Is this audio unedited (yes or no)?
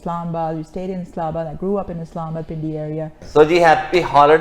no